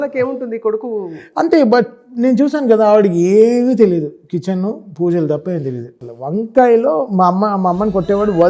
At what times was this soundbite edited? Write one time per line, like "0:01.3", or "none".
0:06.0

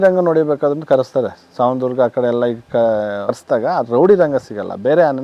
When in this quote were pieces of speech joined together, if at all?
0:03.3

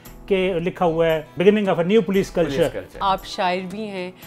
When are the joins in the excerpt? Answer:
0:01.3
0:03.0

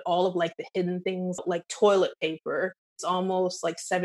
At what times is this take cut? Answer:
0:01.4
0:02.9

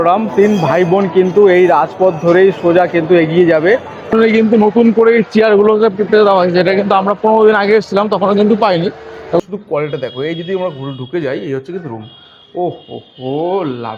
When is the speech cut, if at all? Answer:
0:04.1
0:09.4

